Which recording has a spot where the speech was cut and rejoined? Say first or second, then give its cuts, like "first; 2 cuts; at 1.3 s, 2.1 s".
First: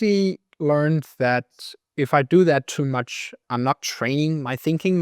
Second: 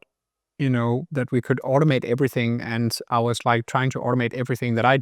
first; 1 cut; at 3.3 s